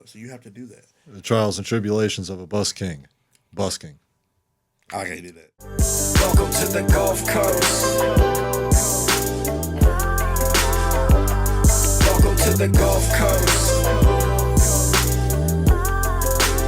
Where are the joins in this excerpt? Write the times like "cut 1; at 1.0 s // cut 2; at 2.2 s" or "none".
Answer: cut 1; at 5.5 s